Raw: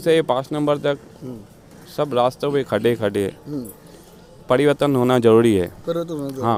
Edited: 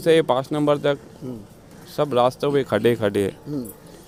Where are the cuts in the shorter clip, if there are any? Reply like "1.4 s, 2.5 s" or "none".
none

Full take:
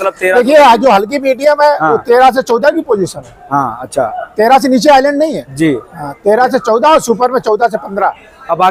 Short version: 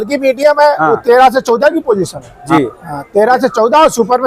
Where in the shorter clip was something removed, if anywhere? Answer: 2.4 s

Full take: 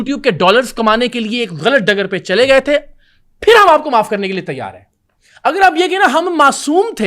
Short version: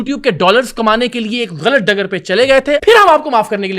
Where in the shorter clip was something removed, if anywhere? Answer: 2.8 s

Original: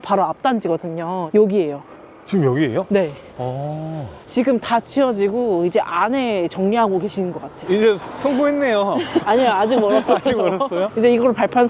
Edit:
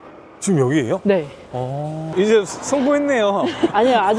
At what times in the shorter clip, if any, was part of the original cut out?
2.0 s

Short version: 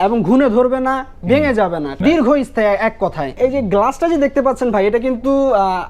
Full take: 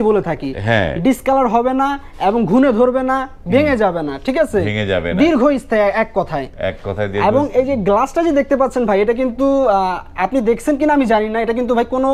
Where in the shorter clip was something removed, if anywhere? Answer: 2.0 s, 3.4 s

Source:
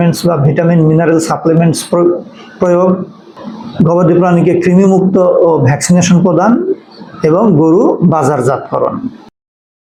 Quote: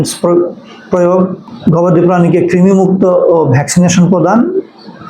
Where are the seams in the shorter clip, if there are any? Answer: 1.5 s

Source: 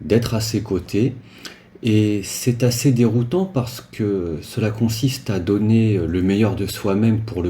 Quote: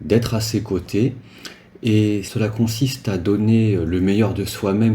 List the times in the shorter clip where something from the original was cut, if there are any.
2.3 s

